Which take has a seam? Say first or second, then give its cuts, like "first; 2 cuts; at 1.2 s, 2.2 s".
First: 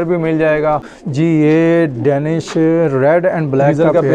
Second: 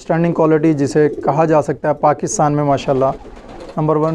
first; 1 cut; at 1.0 s